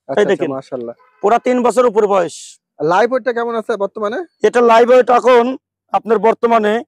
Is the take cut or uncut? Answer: uncut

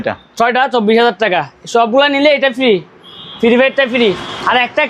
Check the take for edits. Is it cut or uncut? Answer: uncut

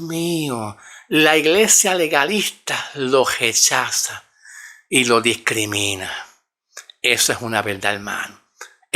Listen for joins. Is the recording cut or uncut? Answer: uncut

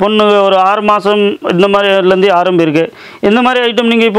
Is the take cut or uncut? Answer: uncut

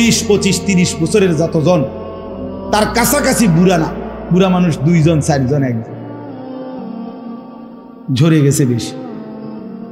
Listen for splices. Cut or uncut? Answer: cut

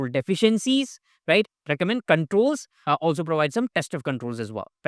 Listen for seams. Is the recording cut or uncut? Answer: cut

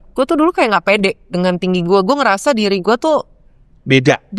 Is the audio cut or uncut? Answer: uncut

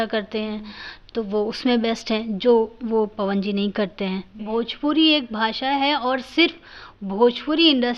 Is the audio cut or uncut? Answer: cut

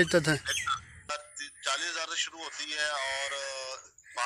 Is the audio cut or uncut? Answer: cut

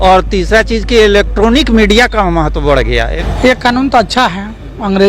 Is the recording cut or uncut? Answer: cut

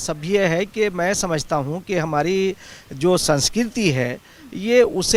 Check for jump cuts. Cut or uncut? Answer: uncut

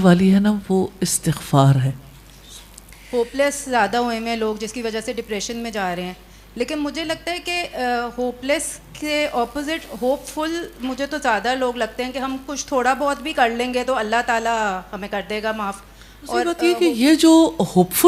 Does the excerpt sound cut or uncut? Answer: cut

